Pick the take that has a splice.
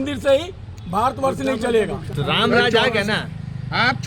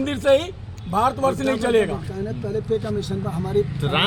first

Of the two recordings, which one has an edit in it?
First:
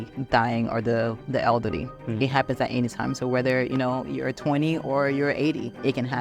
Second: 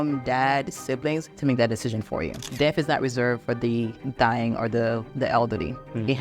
second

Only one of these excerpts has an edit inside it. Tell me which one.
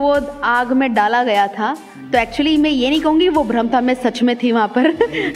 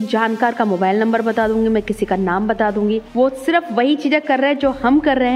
second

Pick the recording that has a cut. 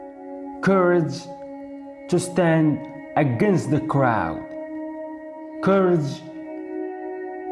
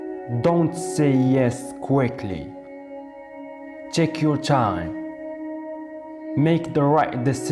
first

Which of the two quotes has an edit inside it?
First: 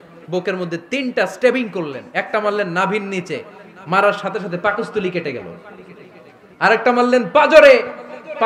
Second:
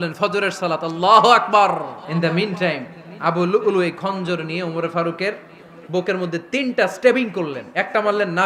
second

